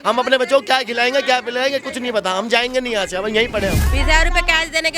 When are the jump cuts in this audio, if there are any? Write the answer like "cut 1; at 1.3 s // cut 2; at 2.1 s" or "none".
cut 1; at 3.9 s